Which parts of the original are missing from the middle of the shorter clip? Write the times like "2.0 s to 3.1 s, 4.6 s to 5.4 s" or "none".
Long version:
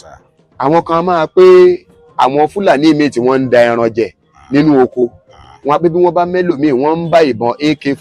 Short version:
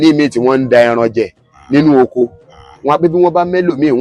none